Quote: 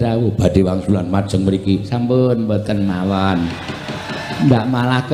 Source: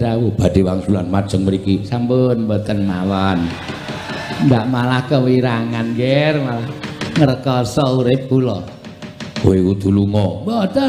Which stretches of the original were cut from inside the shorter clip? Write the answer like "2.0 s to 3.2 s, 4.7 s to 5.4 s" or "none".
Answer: none